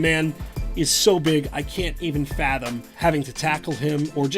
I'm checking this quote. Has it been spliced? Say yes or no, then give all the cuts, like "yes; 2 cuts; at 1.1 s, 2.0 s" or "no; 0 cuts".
yes; 1 cut; at 2.9 s